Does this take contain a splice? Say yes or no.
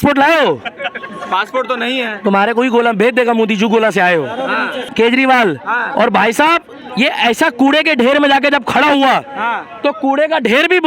yes